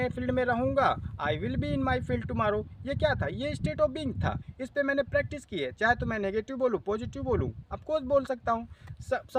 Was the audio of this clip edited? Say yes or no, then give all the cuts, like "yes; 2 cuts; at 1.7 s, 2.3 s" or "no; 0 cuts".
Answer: no; 0 cuts